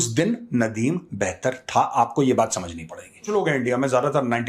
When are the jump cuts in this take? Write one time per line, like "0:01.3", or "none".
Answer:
0:03.3